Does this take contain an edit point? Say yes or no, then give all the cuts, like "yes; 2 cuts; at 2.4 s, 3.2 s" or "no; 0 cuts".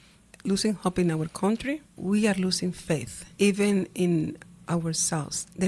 yes; 2 cuts; at 1.9 s, 3.2 s